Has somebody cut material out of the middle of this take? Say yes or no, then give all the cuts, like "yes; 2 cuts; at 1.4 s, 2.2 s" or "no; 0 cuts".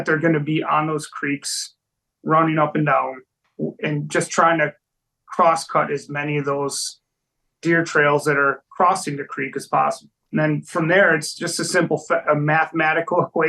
yes; 2 cuts; at 3.3 s, 10.1 s